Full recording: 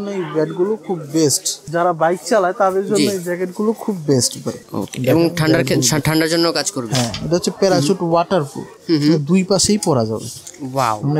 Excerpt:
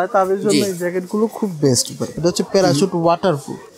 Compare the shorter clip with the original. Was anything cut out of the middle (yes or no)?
yes